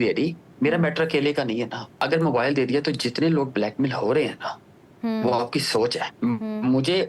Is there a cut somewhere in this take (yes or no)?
yes